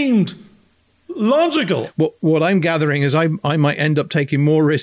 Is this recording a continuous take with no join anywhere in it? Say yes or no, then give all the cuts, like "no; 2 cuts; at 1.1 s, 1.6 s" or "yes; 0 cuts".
no; 1 cut; at 1.9 s